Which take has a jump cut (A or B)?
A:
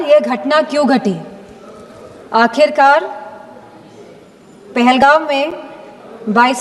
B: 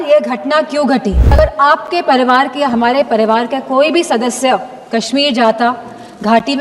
B